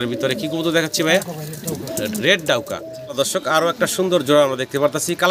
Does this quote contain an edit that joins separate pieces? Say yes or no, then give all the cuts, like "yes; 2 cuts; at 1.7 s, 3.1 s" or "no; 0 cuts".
yes; 1 cut; at 3.0 s